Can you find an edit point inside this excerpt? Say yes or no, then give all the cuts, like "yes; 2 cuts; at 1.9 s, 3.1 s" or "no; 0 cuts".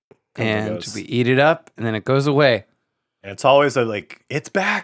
no; 0 cuts